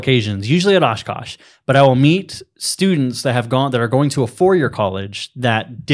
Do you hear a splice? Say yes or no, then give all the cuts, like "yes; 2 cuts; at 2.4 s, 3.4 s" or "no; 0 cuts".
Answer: no; 0 cuts